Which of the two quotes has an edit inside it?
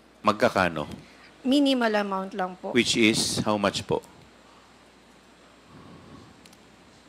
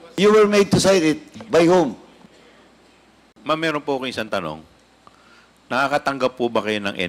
second; 1 cut; at 3.4 s

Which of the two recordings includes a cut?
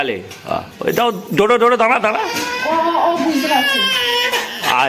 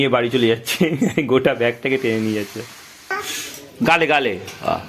second; 1 cut; at 3.1 s

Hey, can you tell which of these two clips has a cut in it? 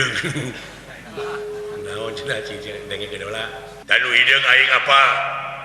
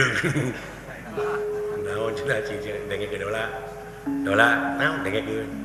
first; 1 cut; at 3.8 s

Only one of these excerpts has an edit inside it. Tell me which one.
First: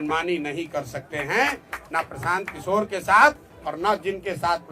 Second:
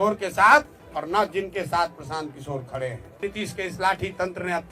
second; 1 cut; at 3.2 s

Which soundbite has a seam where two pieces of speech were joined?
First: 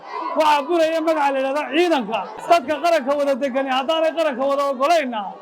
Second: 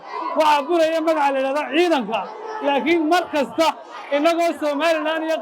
first; 1 cut; at 2.4 s

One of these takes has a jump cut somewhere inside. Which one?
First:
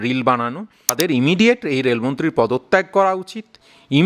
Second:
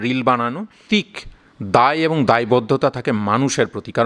first; 1 cut; at 0.9 s

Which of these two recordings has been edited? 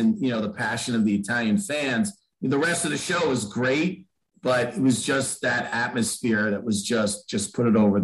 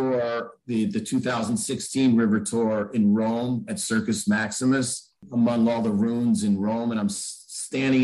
second; 1 cut; at 5.2 s

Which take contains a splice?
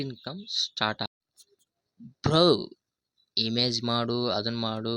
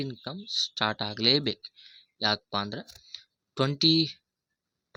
first; 1 cut; at 1.1 s

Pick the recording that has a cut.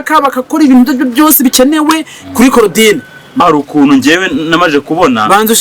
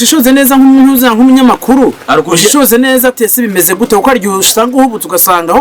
first; 1 cut; at 3.4 s

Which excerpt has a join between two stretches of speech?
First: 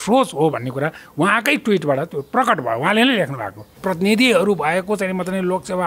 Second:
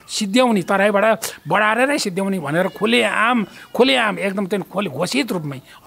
first; 1 cut; at 3.7 s

